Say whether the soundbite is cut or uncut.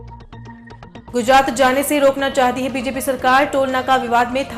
cut